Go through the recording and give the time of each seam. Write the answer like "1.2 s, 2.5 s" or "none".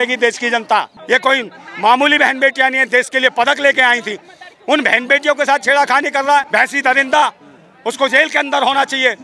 0.9 s, 6.5 s